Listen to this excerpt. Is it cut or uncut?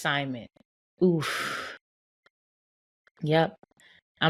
uncut